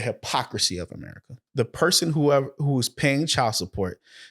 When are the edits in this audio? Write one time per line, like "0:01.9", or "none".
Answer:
0:01.4